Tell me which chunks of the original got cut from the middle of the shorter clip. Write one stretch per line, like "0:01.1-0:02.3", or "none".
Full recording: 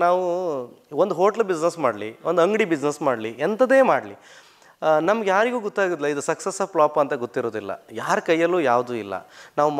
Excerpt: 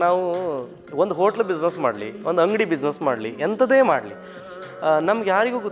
none